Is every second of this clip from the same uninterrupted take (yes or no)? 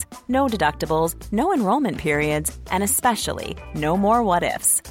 yes